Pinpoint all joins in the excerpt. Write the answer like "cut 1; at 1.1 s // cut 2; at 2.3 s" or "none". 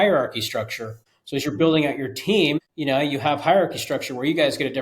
cut 1; at 1.3 s // cut 2; at 2.7 s